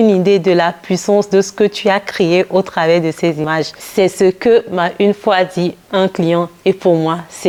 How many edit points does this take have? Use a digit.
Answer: 0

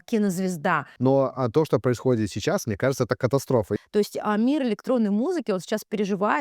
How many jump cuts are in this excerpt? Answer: 2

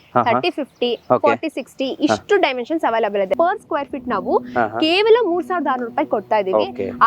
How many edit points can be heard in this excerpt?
1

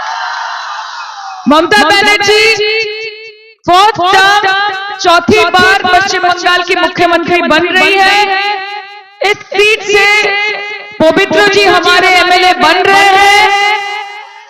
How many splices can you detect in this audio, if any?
0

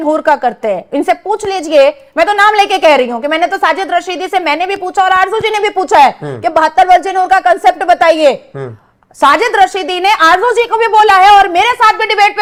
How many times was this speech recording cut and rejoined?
0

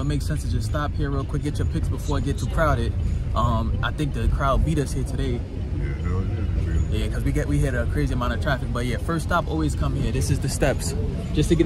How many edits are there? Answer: 0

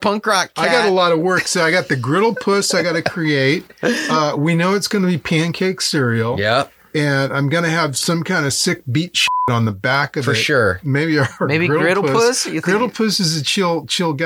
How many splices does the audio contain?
1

